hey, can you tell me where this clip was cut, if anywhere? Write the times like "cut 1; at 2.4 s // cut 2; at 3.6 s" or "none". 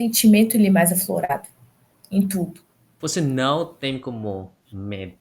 cut 1; at 2.9 s